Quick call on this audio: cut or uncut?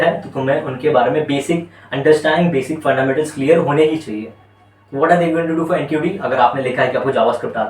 uncut